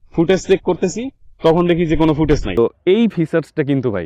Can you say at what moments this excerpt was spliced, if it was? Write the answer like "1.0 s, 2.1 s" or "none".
2.5 s